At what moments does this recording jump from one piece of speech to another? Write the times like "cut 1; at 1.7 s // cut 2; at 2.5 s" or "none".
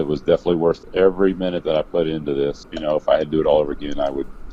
cut 1; at 0.8 s // cut 2; at 2.7 s